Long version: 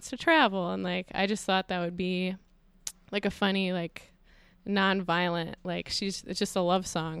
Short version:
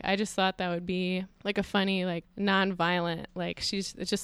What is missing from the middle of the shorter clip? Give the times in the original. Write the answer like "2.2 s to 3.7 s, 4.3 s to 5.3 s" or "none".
2.4 s to 3.0 s, 3.9 s to 4.6 s